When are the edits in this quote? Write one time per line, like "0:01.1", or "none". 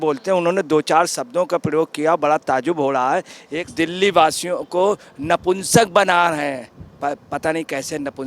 0:03.6